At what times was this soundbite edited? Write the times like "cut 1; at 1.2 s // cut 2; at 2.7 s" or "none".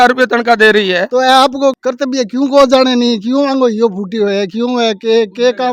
cut 1; at 1.1 s